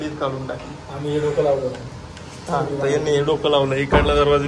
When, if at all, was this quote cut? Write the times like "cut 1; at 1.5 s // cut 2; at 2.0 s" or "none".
none